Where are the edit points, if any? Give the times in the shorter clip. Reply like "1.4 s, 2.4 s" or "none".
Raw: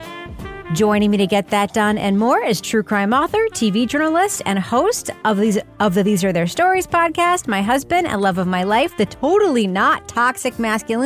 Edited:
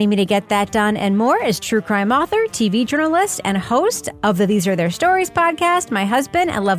4.1 s